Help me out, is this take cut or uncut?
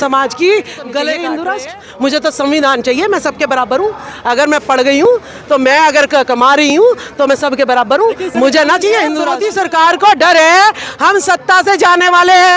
cut